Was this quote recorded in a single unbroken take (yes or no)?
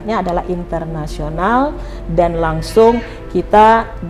yes